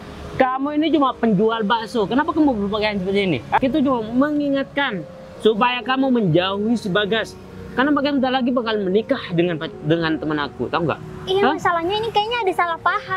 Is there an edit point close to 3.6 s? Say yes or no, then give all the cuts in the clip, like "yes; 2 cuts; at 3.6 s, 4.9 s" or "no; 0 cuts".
yes; 1 cut; at 3.6 s